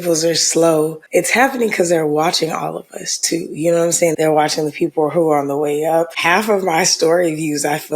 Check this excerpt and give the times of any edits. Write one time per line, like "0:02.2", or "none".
0:01.0
0:04.1
0:06.2